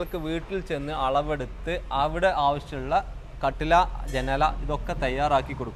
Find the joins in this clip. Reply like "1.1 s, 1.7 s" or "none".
none